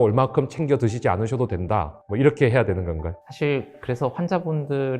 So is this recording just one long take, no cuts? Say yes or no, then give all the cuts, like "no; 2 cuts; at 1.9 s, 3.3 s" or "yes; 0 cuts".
no; 2 cuts; at 2.0 s, 3.2 s